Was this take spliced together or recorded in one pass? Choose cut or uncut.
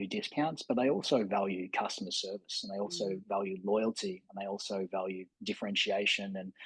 uncut